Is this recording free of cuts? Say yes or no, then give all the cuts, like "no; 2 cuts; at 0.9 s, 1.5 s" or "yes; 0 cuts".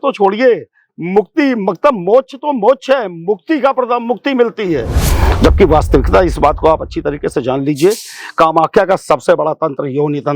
no; 1 cut; at 5.0 s